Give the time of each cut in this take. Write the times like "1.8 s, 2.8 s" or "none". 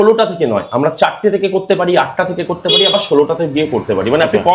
none